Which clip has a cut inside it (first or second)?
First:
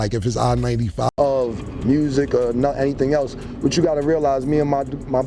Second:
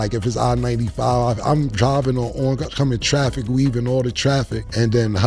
first